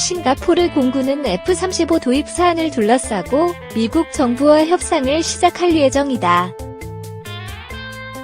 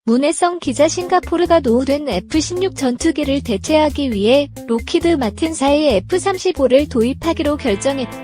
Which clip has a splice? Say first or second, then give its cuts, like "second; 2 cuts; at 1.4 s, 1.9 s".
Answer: first; 1 cut; at 6.5 s